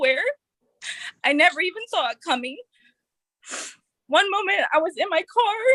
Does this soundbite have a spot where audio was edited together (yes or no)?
no